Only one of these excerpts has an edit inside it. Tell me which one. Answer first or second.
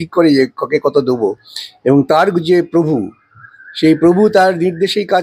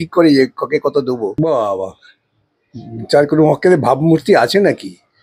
second